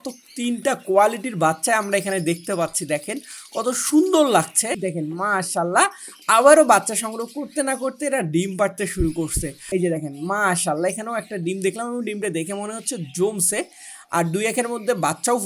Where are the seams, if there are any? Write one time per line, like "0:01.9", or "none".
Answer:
0:04.8
0:09.6